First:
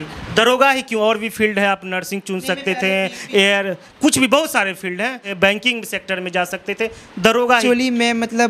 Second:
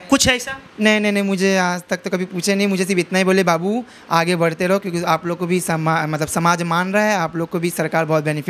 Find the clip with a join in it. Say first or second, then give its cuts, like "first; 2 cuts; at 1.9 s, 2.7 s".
first; 2 cuts; at 5.3 s, 7.6 s